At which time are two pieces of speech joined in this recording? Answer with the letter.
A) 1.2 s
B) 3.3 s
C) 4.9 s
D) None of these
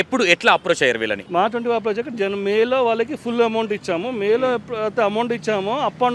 A